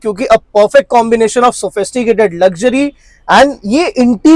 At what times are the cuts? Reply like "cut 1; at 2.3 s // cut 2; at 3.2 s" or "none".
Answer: none